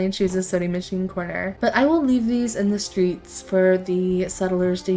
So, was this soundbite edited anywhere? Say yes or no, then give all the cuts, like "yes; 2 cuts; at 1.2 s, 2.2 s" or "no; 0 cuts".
yes; 1 cut; at 1.5 s